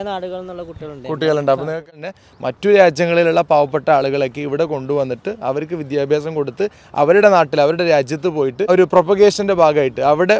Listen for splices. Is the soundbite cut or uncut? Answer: cut